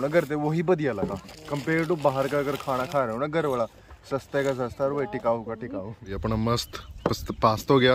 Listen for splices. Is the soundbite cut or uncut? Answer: uncut